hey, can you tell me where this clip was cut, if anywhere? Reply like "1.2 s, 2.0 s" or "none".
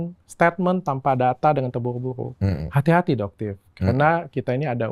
none